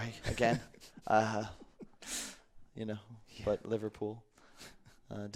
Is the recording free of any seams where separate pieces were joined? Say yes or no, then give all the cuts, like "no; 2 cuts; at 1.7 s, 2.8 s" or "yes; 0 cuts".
yes; 0 cuts